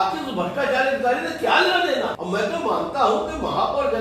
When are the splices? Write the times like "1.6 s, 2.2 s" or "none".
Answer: 2.2 s